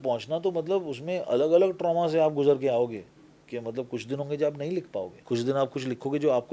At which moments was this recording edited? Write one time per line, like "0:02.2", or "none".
0:05.2